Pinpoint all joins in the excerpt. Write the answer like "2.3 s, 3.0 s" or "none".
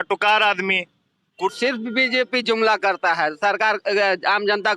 1.5 s